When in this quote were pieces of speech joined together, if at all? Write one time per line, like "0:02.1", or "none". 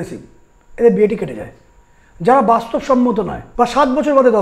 0:03.4